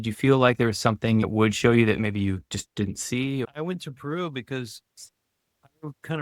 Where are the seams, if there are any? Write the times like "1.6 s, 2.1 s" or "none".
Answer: 1.2 s, 3.4 s